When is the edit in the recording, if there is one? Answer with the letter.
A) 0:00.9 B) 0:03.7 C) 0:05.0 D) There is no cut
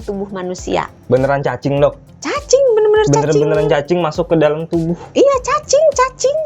A